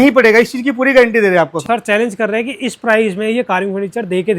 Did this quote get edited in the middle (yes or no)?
yes